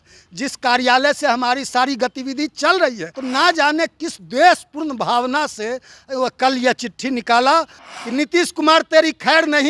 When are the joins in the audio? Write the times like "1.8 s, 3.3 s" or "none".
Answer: 3.1 s, 7.8 s